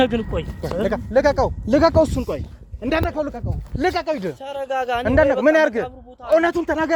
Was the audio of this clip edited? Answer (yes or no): no